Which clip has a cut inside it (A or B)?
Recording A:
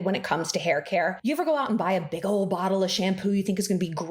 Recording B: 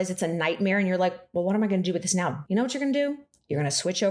B